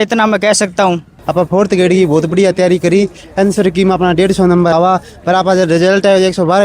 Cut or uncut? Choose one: cut